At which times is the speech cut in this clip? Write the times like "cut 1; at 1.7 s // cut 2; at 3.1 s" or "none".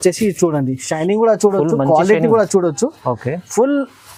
none

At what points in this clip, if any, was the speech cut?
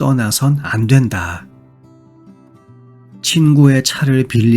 cut 1; at 1.8 s // cut 2; at 3.3 s

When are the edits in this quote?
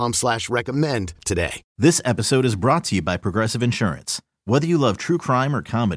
cut 1; at 1.6 s

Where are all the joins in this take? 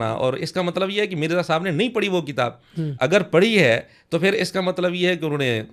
none

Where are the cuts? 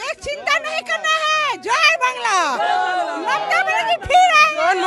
none

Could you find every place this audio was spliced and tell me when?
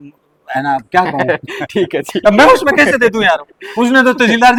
none

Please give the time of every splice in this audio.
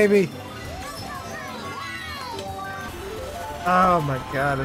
cut 1; at 2.9 s

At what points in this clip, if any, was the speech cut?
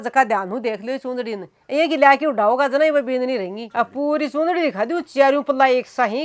cut 1; at 3.6 s

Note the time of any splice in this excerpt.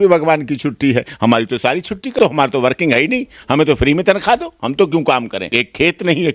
cut 1; at 2.2 s // cut 2; at 5.5 s

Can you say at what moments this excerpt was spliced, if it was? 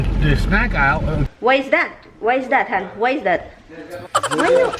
cut 1; at 1.3 s

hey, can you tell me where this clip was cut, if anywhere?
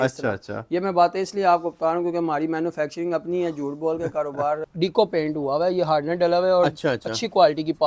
cut 1; at 4.6 s

